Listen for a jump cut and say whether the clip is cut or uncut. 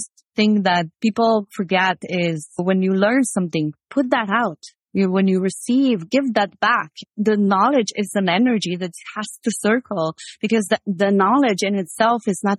cut